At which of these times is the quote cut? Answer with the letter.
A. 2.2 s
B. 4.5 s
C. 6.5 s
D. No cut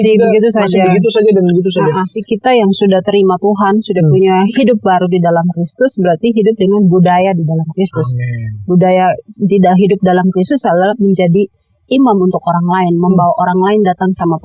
A